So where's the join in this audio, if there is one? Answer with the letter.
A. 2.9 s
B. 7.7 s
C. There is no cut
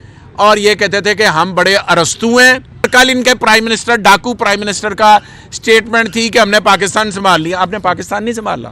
A